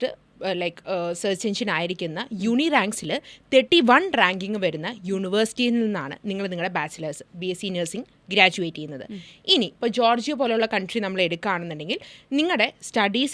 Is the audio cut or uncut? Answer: uncut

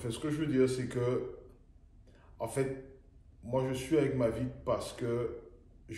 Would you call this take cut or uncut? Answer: uncut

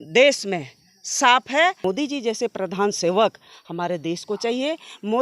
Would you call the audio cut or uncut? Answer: cut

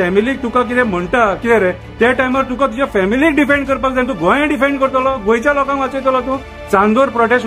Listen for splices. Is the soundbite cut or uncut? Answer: cut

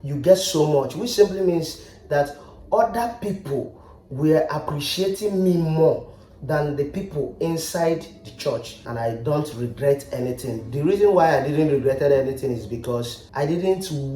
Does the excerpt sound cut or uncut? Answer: cut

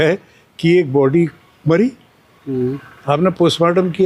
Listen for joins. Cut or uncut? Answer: uncut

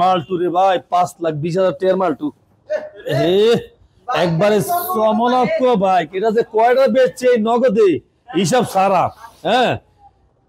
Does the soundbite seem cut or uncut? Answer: uncut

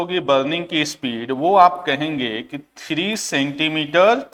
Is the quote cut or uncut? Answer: uncut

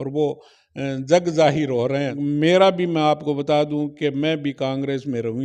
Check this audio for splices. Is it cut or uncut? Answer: cut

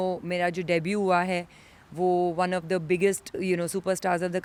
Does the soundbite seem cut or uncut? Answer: uncut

